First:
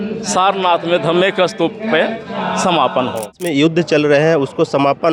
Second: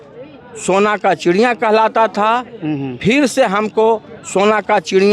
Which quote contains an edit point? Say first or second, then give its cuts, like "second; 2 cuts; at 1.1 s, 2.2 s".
first; 1 cut; at 3.4 s